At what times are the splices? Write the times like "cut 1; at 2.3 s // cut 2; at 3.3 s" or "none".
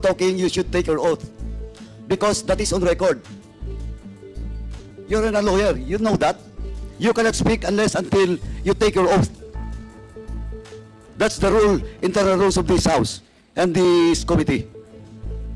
cut 1; at 3.2 s // cut 2; at 4.6 s // cut 3; at 14.6 s